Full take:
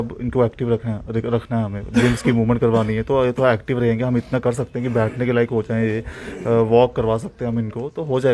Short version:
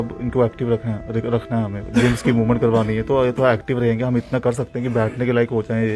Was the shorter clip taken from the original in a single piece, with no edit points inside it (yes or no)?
yes